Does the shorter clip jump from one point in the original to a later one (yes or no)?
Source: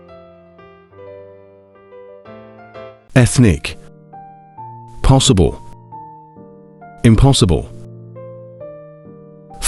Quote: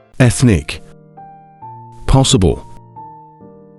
no